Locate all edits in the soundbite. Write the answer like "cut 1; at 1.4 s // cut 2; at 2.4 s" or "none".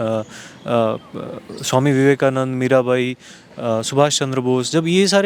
none